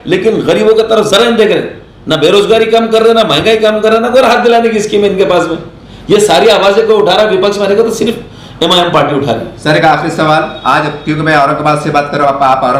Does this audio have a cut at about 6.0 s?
no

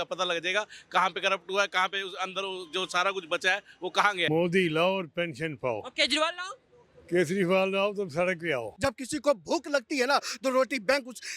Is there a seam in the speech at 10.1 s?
no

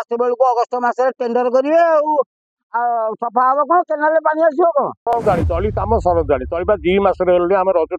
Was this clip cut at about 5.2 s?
yes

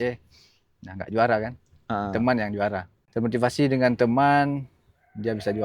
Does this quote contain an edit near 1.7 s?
no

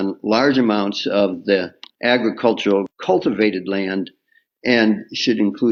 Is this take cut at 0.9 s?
no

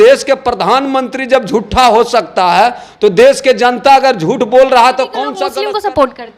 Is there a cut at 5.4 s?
yes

